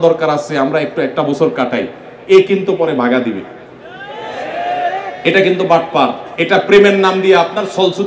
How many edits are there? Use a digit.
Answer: 1